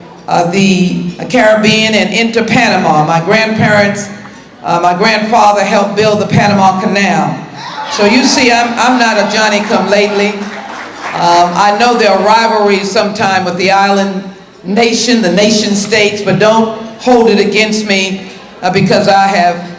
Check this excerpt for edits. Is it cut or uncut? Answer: uncut